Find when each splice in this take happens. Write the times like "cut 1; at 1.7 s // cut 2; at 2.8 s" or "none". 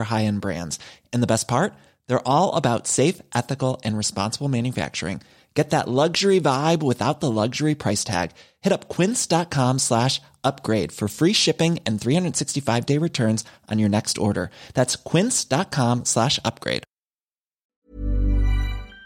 cut 1; at 17.7 s